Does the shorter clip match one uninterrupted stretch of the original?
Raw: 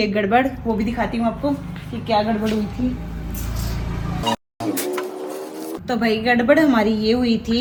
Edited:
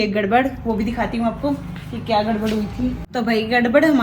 no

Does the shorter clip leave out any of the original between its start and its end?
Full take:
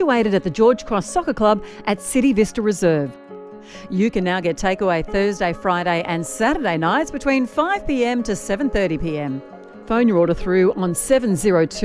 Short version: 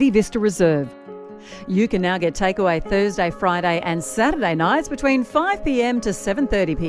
no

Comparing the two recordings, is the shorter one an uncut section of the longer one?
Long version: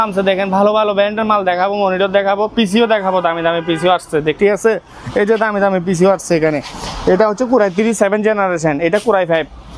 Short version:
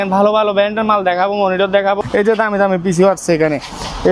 no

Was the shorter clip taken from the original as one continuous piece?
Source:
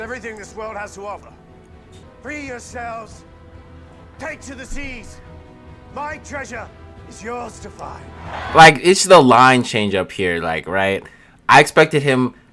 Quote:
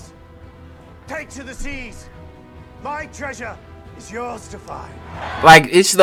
yes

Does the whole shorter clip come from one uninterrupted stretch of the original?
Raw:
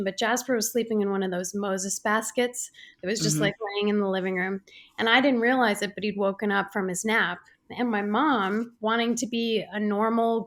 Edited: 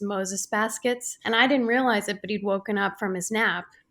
no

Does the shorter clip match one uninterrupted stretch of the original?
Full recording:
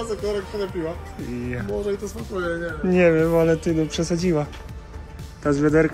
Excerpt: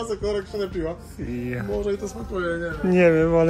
yes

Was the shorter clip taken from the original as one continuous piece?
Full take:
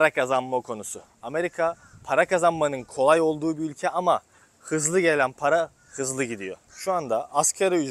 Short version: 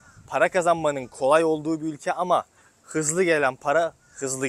yes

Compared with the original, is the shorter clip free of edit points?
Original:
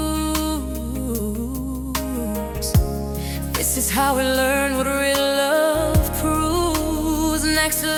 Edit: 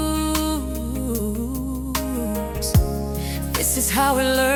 yes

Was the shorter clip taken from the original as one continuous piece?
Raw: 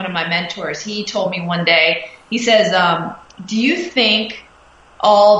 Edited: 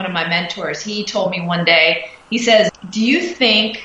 no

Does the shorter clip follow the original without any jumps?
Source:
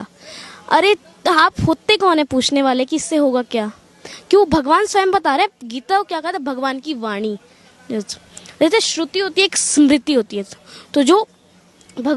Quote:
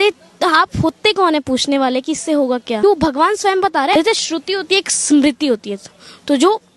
no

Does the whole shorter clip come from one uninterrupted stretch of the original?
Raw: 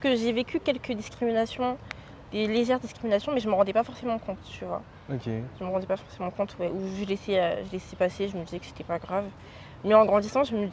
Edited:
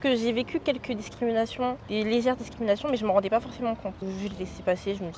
no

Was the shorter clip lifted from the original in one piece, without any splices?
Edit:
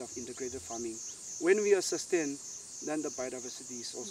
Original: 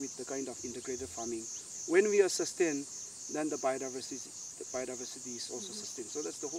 no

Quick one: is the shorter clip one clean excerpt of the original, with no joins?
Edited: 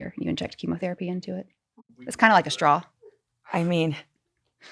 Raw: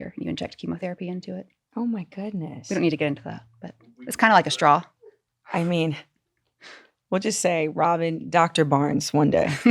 no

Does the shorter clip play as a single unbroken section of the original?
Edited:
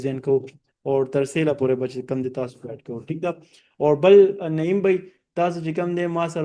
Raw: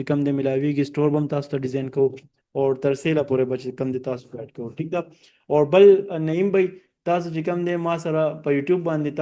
yes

